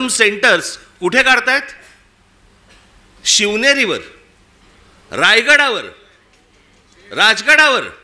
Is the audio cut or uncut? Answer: uncut